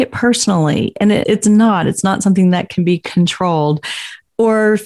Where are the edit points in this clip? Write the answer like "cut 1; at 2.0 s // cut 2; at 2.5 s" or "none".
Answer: cut 1; at 1.2 s